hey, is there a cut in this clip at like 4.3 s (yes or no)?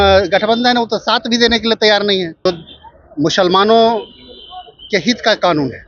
no